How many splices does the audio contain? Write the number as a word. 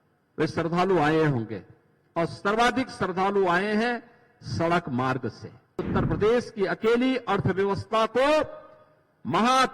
one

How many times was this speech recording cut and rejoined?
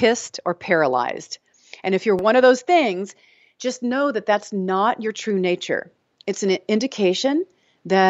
one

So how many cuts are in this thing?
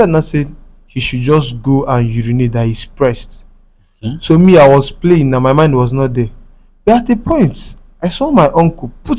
zero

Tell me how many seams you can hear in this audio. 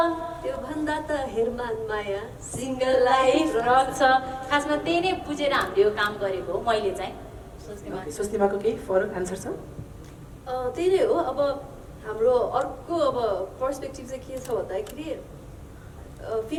zero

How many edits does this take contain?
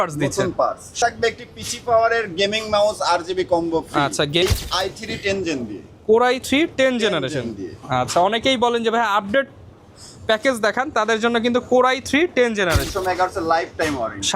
three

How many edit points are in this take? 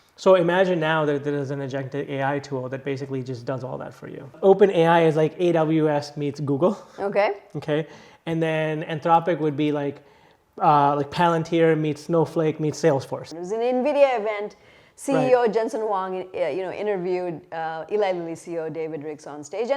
two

